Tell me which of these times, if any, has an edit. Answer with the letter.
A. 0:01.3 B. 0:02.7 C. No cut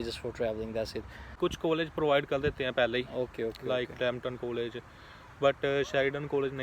A